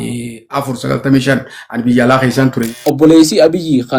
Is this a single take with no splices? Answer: no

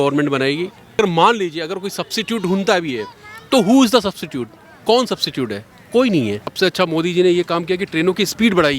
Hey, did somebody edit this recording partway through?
yes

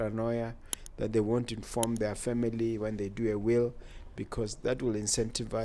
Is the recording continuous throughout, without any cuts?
yes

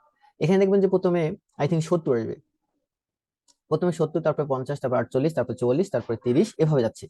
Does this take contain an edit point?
no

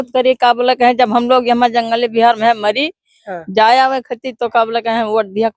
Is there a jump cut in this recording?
no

